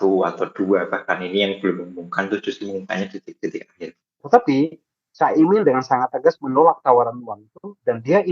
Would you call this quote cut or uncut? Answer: cut